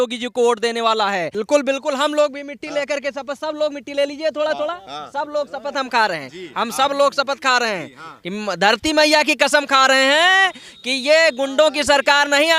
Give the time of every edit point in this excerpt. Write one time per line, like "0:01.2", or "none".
0:01.3